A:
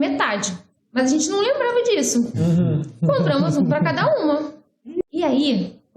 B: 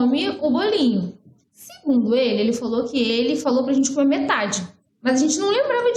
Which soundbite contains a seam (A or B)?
A